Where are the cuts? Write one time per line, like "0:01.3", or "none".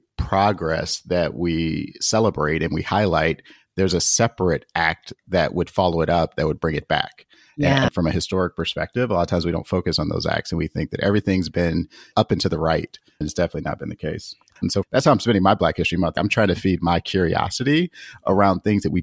0:07.9
0:14.7
0:16.1